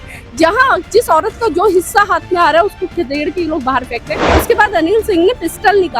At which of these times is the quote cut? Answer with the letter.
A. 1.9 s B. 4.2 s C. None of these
B